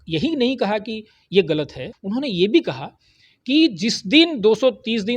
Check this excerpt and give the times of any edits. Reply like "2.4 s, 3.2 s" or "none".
1.9 s

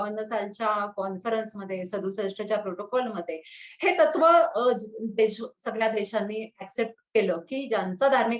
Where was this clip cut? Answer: none

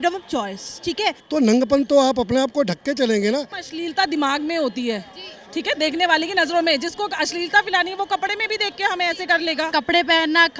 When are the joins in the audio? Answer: 1.2 s, 3.6 s, 9.7 s

